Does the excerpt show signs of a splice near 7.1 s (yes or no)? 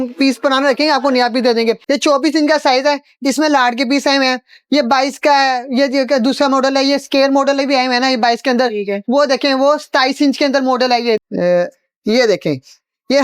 no